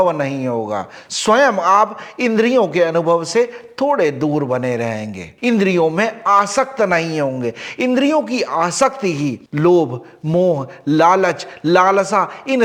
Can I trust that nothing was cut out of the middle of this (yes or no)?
yes